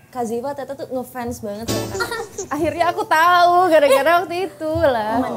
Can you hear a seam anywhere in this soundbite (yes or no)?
yes